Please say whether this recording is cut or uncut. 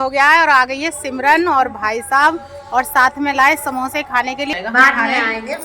cut